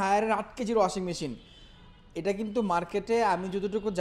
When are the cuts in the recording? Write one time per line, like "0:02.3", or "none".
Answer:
none

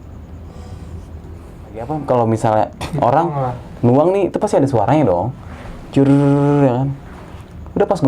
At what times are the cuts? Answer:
0:01.9

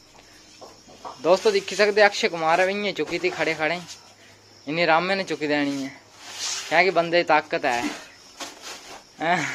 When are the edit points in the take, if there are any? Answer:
none

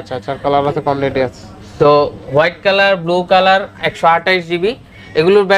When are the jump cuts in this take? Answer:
none

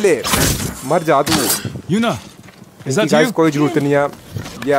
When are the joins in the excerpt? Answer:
none

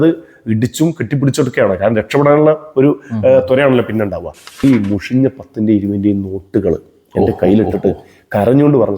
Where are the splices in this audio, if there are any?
0:04.6

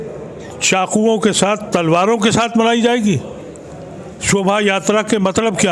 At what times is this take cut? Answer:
none

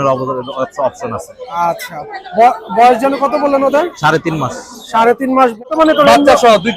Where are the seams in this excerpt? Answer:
0:05.6

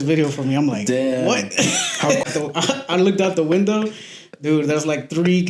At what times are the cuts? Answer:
0:02.2

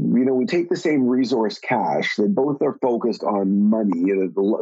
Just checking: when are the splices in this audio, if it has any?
none

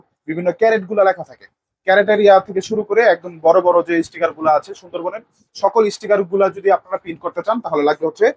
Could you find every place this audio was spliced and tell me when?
none

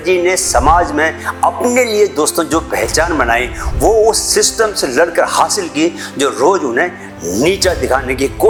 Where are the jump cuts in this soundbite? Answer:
none

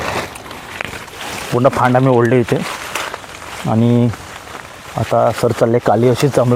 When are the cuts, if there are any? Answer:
none

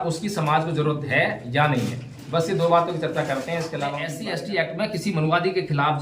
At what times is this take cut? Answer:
0:04.2

